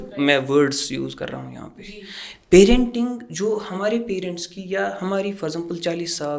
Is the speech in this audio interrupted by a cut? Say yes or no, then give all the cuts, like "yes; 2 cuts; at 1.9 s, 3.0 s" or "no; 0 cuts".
no; 0 cuts